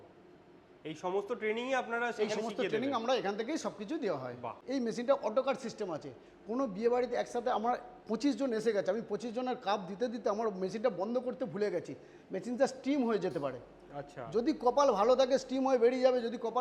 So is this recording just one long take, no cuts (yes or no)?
no